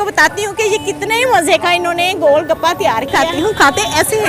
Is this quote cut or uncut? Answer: cut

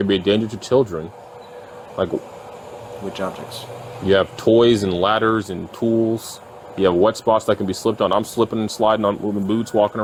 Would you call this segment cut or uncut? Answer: uncut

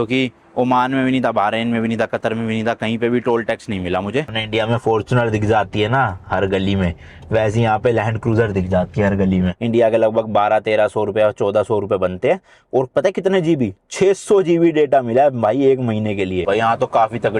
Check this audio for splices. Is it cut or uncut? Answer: cut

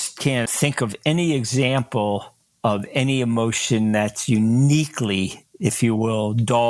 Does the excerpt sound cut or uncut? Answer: uncut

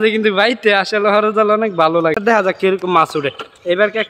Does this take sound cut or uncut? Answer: cut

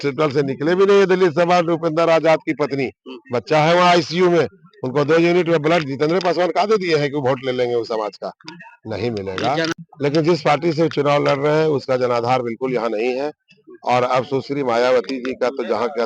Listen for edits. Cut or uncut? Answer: cut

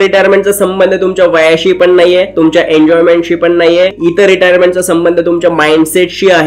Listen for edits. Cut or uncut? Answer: cut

